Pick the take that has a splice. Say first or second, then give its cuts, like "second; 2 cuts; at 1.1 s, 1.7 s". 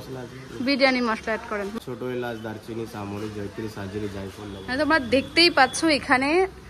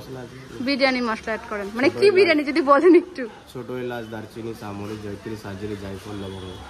first; 2 cuts; at 1.6 s, 4.6 s